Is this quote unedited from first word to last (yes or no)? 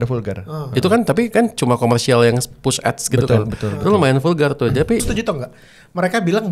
no